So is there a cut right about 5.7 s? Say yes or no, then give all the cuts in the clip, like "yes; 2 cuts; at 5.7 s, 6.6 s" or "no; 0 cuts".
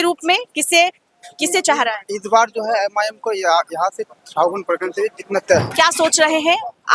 yes; 1 cut; at 5.7 s